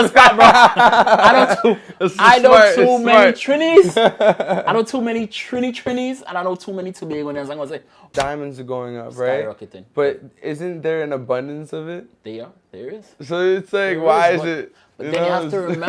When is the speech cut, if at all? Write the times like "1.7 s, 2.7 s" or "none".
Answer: 8.0 s